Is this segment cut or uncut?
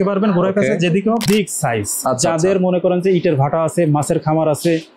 cut